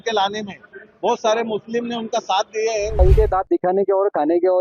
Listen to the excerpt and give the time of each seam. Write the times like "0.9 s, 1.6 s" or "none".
3.0 s